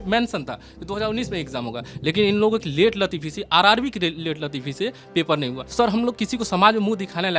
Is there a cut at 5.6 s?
yes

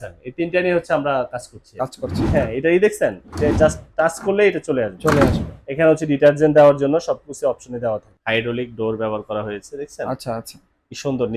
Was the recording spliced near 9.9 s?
no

